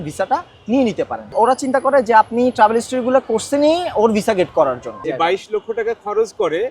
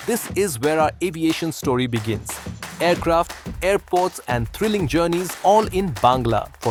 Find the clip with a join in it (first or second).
first